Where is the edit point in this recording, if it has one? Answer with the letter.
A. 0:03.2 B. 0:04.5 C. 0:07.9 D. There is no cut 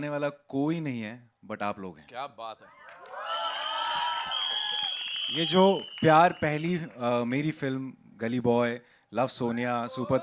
D